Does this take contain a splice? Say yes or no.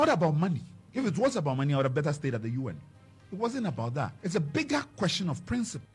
yes